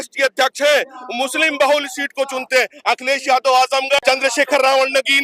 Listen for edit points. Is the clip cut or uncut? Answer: cut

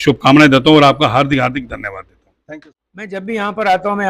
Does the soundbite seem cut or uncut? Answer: cut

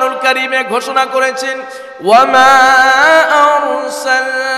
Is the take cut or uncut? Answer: uncut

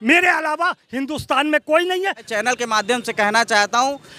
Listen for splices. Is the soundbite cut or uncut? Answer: cut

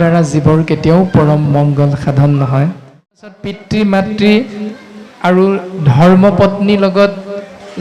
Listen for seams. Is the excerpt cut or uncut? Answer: cut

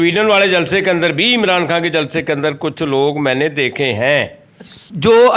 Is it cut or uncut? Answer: uncut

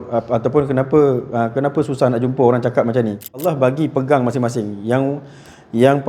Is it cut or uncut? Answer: cut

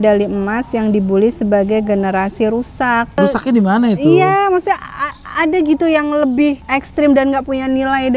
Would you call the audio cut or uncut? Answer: cut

